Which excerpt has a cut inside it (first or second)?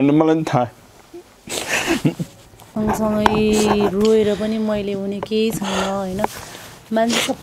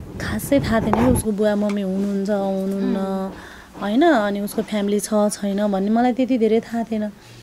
first